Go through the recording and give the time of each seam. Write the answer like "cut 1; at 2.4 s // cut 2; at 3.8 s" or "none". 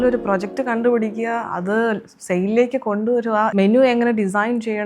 cut 1; at 3.5 s